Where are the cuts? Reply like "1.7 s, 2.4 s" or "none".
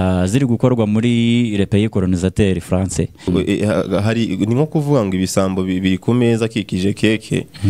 3.3 s